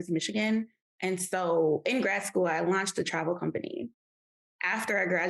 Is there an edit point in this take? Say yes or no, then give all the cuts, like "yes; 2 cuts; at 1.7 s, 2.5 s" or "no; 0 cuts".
no; 0 cuts